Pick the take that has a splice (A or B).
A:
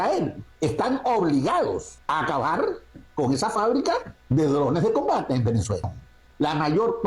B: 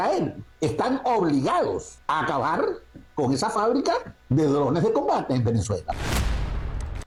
A